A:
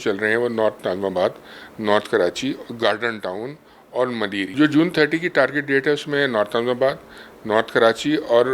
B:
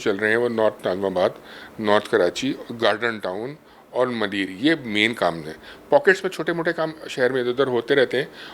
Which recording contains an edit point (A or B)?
A